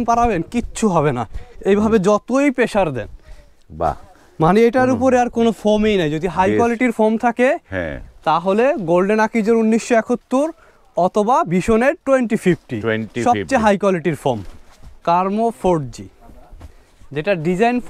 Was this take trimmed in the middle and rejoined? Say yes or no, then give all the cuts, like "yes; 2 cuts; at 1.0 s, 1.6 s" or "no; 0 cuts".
yes; 1 cut; at 14.5 s